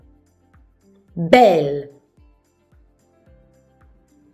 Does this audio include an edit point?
yes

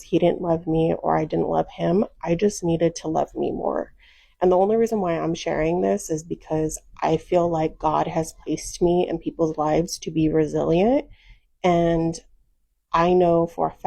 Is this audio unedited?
no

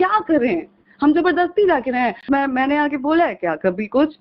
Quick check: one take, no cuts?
no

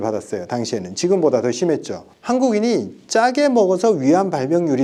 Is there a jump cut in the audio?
no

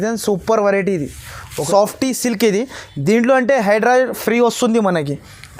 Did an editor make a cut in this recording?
yes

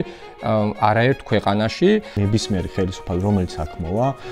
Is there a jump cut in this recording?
yes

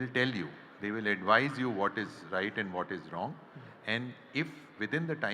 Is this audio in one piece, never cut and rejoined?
yes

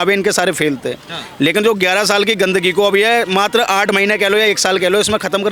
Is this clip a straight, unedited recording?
yes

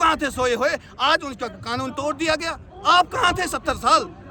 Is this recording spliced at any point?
no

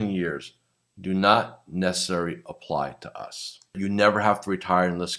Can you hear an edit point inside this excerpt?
yes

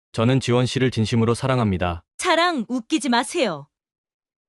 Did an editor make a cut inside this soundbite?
yes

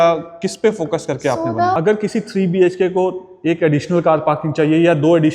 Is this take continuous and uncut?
no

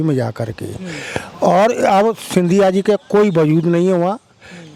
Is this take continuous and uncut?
yes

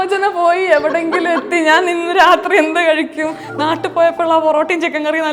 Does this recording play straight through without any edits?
yes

